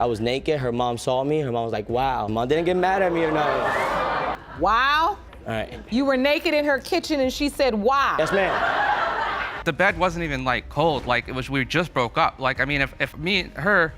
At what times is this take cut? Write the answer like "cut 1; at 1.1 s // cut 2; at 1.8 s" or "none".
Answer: cut 1; at 9.6 s